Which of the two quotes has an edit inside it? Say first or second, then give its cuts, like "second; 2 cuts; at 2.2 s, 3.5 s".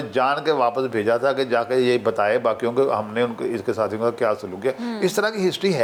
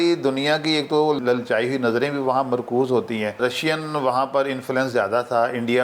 second; 2 cuts; at 1.2 s, 3.4 s